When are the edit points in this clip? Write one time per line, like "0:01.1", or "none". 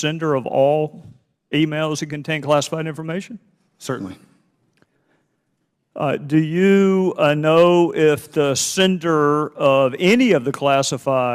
none